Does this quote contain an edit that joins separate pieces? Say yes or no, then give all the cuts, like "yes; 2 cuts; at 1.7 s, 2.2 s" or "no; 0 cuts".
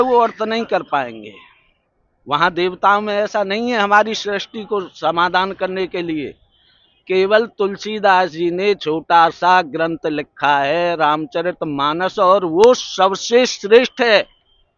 no; 0 cuts